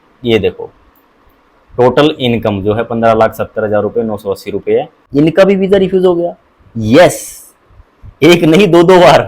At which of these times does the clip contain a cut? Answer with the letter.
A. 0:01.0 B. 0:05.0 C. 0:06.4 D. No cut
B